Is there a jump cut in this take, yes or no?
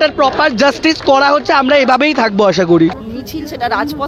yes